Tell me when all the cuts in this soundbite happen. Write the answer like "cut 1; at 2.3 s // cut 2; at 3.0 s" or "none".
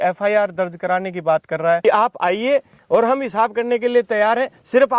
cut 1; at 1.8 s